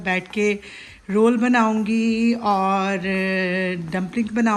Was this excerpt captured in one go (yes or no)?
yes